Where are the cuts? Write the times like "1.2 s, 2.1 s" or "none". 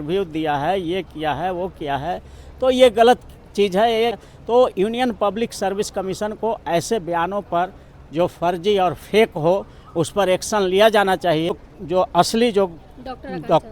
4.2 s, 11.6 s